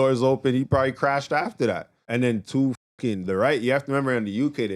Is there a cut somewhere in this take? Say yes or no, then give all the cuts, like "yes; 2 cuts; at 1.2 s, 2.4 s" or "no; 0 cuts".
yes; 1 cut; at 1.9 s